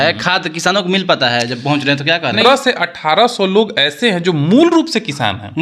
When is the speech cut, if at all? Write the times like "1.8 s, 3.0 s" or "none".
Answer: 2.4 s